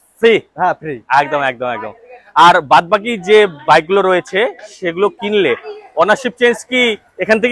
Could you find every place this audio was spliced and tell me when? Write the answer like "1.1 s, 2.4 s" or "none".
none